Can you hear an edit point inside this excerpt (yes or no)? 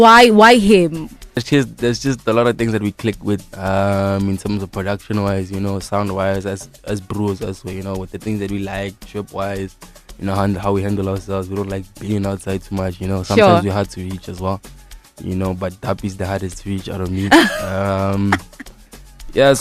yes